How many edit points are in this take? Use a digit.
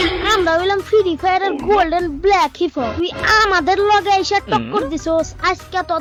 0